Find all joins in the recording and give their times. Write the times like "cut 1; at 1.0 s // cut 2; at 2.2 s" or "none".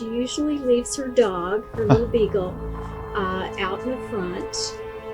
none

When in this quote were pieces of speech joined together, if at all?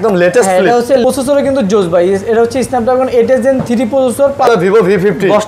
cut 1; at 1.0 s // cut 2; at 4.5 s

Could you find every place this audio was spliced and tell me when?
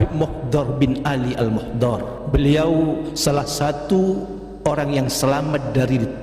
cut 1; at 2.2 s // cut 2; at 3.1 s

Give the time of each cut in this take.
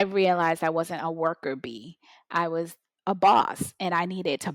none

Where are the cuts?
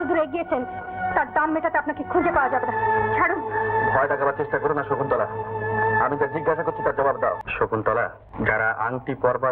cut 1; at 7.4 s // cut 2; at 8.2 s

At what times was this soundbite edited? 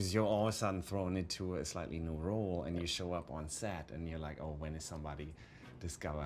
none

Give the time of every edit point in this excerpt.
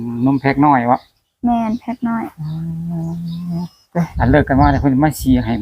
cut 1; at 4.1 s

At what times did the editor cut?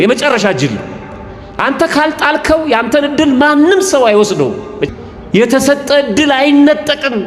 cut 1; at 4.8 s

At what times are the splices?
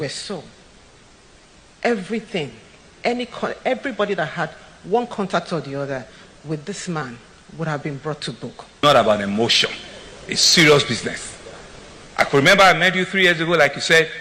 cut 1; at 8.8 s

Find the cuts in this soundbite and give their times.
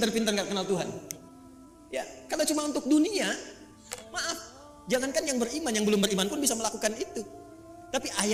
none

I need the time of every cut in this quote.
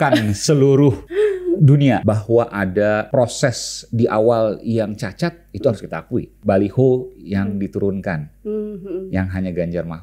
cut 1; at 1.0 s // cut 2; at 2.0 s // cut 3; at 3.1 s // cut 4; at 6.3 s

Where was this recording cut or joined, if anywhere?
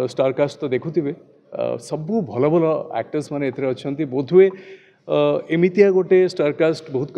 none

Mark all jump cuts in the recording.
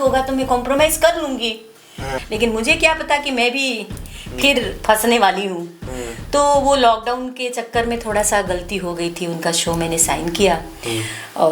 cut 1; at 2.2 s

